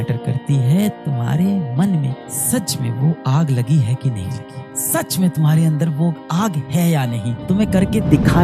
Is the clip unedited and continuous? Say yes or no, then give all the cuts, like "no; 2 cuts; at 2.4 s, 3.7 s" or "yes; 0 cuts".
yes; 0 cuts